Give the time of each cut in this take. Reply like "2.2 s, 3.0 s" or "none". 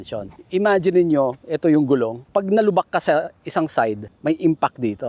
2.2 s, 4.1 s

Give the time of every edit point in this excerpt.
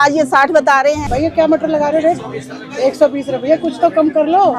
1.0 s

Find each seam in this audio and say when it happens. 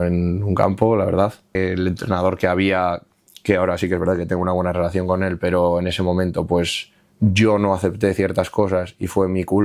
1.6 s

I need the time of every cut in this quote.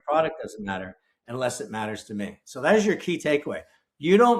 none

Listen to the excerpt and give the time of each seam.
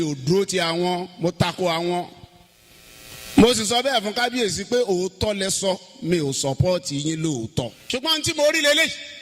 7.8 s

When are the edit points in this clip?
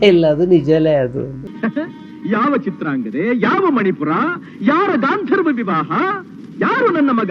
1.4 s

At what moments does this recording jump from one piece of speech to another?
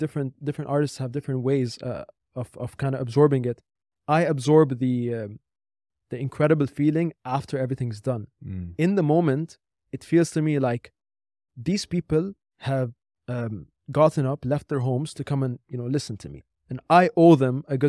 16.4 s

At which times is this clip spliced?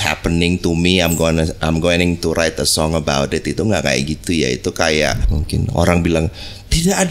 5.3 s

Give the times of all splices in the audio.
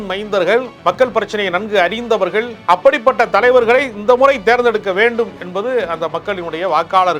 2.6 s

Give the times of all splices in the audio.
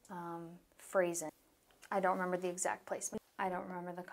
1.3 s, 3.1 s

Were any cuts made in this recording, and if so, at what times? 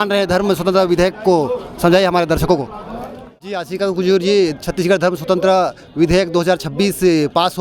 3.6 s

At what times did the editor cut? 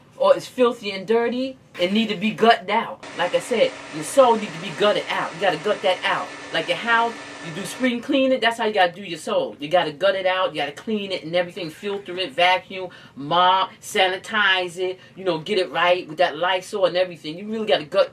1.6 s

